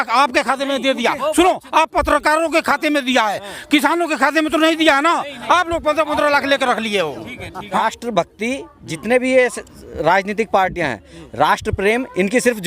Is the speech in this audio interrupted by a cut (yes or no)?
yes